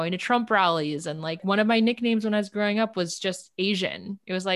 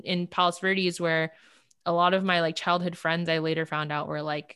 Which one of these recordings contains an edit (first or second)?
first